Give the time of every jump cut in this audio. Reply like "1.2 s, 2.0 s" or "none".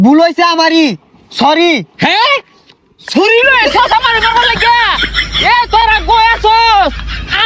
none